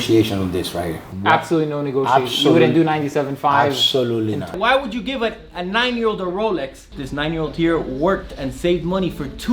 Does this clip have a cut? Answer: yes; 3 cuts; at 1.1 s, 4.5 s, 6.9 s

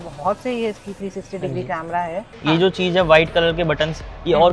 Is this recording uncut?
no; 1 cut; at 2.3 s

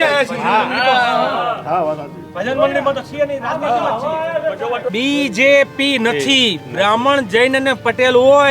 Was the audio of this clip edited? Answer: yes; 1 cut; at 4.8 s

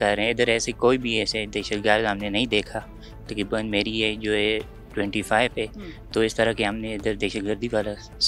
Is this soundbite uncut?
yes; 0 cuts

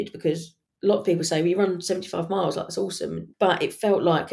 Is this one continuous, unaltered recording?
no; 1 cut; at 3.2 s

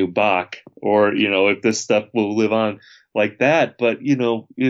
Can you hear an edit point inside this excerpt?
no; 0 cuts

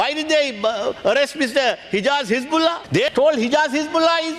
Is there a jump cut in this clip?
yes; 1 cut; at 2.9 s

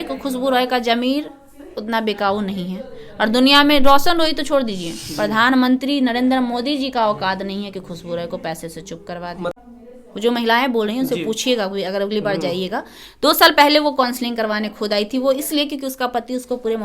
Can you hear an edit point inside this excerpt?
yes; 1 cut; at 9.5 s

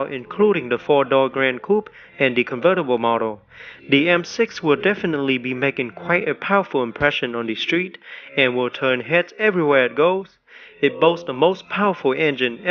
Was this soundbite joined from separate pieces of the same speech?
yes; 1 cut; at 5.2 s

